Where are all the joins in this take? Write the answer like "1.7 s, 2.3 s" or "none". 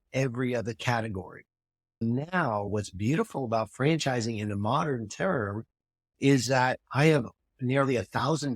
2.7 s